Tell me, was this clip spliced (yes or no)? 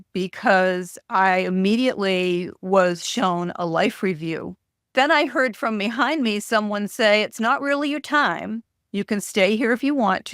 yes